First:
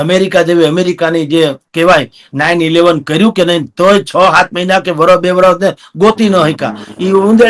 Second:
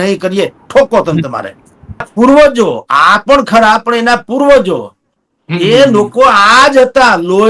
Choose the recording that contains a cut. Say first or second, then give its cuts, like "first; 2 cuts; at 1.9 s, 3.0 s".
second; 1 cut; at 2.0 s